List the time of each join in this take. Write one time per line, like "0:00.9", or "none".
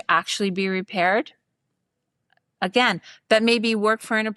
none